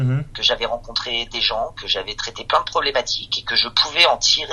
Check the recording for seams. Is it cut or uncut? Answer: uncut